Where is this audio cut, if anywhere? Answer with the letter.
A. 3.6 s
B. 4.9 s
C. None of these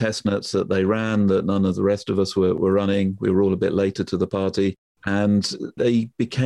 B